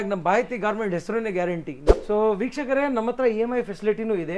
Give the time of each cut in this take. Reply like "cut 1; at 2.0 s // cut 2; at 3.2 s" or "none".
cut 1; at 1.9 s